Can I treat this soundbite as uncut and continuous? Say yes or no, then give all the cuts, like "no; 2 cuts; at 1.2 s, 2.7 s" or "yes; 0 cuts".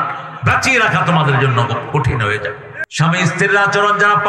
no; 1 cut; at 2.7 s